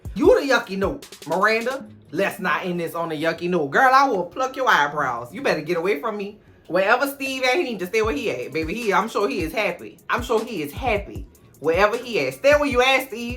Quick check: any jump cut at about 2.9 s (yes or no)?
no